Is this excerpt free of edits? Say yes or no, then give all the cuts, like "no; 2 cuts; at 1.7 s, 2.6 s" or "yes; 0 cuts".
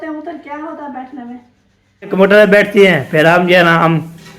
no; 1 cut; at 2.1 s